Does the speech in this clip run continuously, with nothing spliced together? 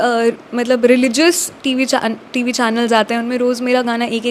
yes; 0 cuts

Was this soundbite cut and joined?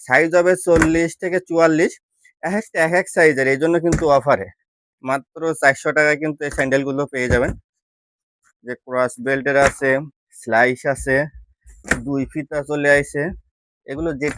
no; 0 cuts

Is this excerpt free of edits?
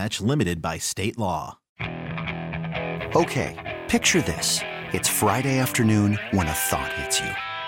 no; 1 cut; at 1.6 s

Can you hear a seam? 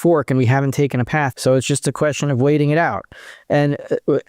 yes; 1 cut; at 1.3 s

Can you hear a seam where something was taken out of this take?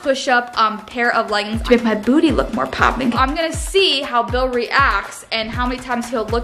yes; 2 cuts; at 1.6 s, 3.1 s

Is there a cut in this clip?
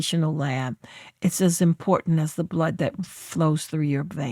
no; 0 cuts

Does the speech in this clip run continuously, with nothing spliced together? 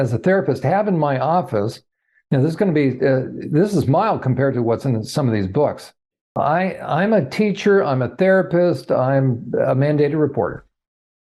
no; 1 cut; at 6.2 s

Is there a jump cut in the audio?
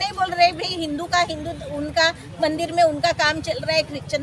no; 0 cuts

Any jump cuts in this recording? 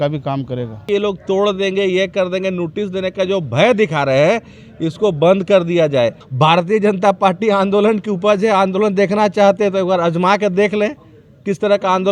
yes; 2 cuts; at 0.8 s, 6.2 s

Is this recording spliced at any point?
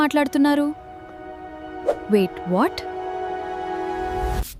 no; 0 cuts

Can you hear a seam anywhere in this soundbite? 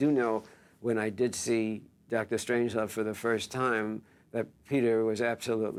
no; 0 cuts

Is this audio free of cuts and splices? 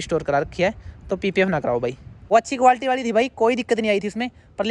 no; 1 cut; at 2.1 s

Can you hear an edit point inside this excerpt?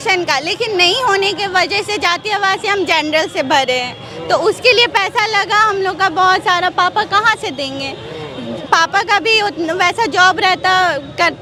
no; 0 cuts

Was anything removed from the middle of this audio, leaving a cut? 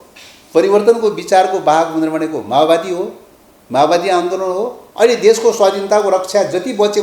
yes; 1 cut; at 4.8 s

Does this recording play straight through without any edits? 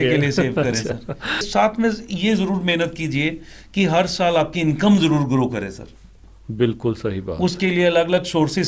no; 1 cut; at 1.5 s

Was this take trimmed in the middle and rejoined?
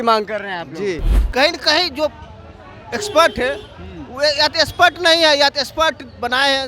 yes; 1 cut; at 1.1 s

